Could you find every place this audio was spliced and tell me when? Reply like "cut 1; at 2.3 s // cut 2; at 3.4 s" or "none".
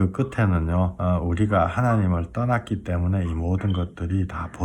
cut 1; at 1.0 s